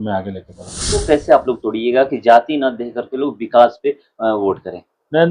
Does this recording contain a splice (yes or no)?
yes